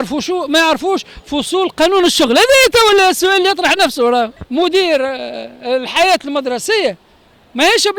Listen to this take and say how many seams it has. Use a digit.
1